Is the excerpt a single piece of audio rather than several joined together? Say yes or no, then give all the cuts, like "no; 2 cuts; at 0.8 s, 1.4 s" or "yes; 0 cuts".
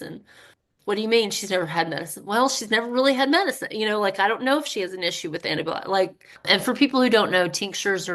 no; 1 cut; at 6.3 s